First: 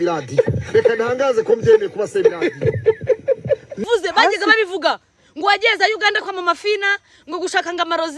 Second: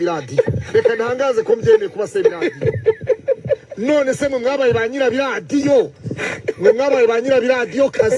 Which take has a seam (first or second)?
first